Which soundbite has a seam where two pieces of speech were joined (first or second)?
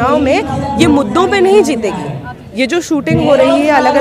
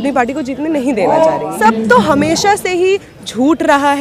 second